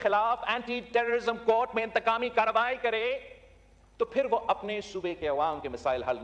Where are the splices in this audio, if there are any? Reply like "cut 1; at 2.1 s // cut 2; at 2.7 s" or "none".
none